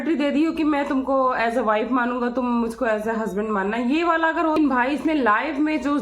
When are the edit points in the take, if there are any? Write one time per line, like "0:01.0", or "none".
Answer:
0:04.6